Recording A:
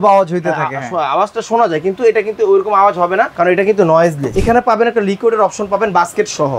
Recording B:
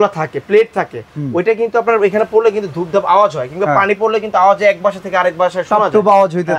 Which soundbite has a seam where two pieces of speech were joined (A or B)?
A